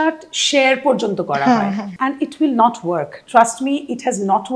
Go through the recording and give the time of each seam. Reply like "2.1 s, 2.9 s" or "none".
1.9 s